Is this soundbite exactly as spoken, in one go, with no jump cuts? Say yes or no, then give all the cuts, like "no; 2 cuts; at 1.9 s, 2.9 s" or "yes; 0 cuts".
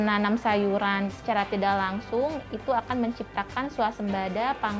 no; 1 cut; at 1.1 s